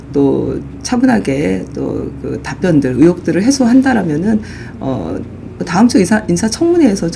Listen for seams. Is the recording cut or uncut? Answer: uncut